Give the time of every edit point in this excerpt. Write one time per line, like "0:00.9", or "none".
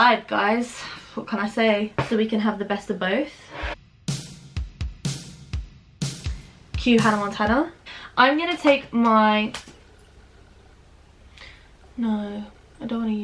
0:01.9
0:07.8